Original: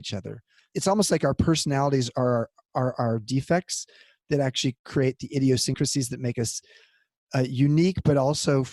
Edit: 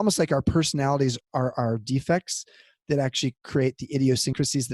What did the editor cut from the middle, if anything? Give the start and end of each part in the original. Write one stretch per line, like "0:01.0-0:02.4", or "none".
0:02.1-0:02.6